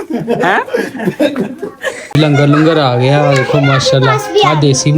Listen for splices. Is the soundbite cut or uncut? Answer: cut